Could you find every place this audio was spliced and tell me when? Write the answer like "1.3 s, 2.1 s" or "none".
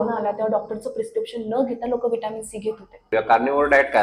3.1 s